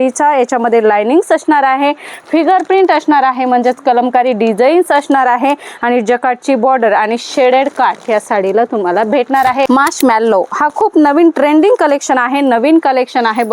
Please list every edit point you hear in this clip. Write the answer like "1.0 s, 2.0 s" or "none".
9.7 s